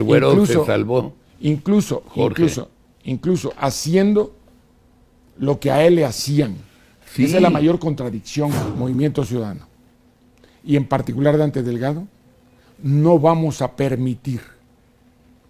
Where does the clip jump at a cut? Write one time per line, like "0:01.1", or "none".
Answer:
0:08.5